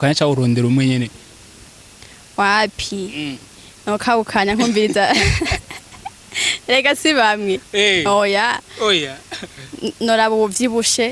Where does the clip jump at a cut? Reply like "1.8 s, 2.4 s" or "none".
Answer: none

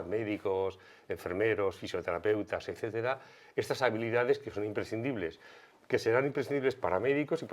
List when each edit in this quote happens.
none

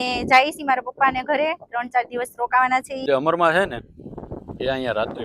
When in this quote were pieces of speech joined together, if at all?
3.0 s

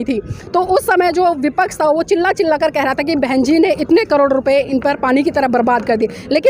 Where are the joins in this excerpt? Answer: none

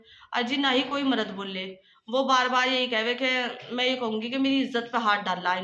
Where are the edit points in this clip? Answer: none

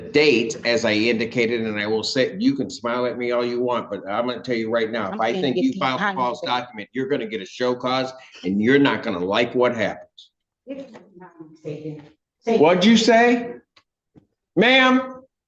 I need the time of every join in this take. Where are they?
10.5 s

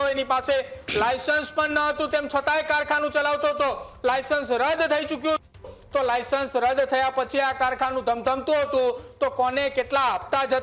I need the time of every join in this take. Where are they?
none

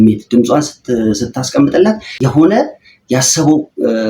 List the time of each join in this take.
2.1 s

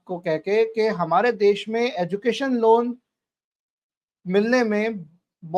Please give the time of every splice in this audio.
none

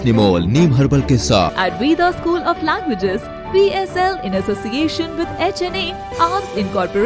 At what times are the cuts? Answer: 1.5 s

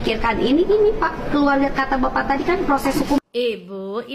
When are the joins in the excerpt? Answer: none

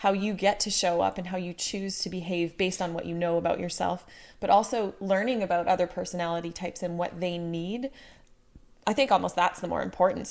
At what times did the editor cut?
none

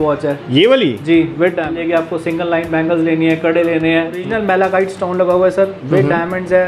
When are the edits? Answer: 1.7 s, 4.3 s

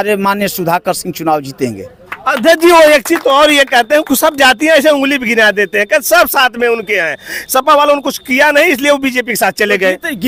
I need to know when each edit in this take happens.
none

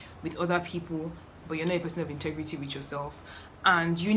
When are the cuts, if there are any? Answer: none

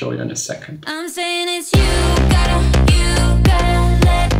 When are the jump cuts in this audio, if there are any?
1.0 s

